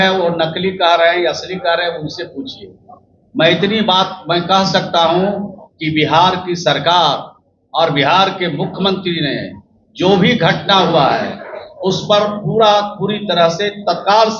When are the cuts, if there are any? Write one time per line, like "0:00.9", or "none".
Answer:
none